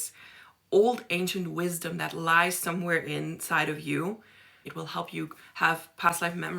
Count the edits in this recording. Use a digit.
1